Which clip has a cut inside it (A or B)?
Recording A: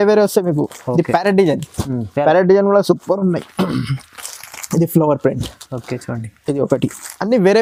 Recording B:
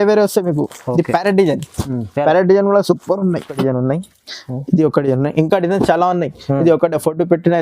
B